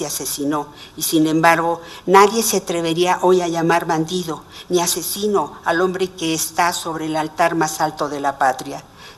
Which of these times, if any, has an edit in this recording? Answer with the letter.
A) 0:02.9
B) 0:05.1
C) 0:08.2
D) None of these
B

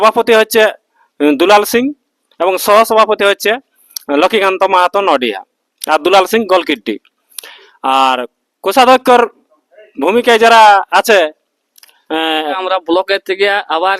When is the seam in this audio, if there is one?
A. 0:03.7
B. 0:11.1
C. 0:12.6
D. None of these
C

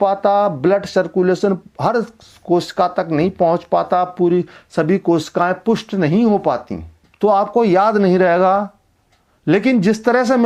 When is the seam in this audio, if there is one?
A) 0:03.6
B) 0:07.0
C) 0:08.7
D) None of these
B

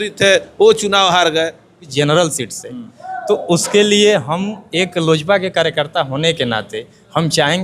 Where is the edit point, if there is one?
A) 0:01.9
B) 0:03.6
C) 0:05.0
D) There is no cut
A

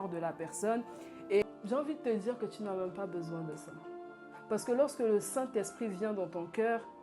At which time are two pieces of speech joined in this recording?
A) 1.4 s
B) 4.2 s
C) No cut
A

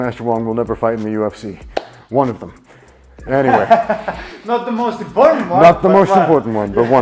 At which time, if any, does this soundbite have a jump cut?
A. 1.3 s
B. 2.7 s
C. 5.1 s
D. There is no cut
D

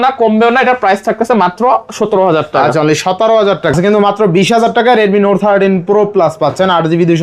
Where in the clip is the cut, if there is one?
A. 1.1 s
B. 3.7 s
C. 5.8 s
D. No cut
B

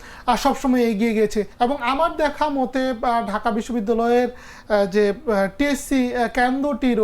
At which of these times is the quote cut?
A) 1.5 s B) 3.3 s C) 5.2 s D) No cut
A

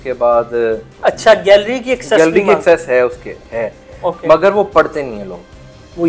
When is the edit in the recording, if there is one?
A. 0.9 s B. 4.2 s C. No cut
A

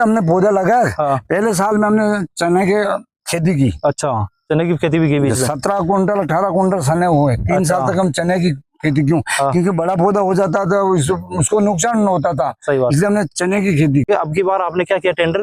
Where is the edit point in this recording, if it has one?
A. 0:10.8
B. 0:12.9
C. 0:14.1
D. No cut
C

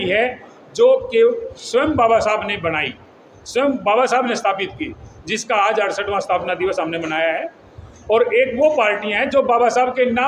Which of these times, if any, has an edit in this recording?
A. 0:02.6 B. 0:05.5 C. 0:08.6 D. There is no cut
D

